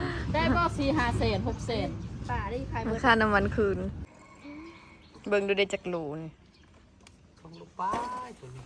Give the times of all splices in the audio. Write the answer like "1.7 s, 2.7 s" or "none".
4.0 s